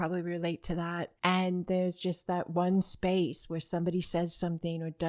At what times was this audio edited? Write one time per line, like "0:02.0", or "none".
0:01.1